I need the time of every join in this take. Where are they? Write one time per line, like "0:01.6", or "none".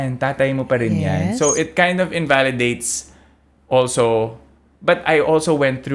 none